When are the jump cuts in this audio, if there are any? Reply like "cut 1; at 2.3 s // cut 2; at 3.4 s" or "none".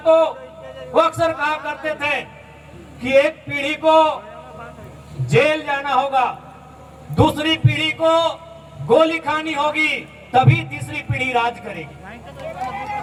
none